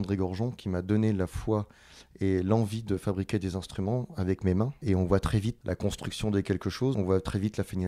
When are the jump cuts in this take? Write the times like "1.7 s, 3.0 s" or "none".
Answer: 5.6 s, 6.9 s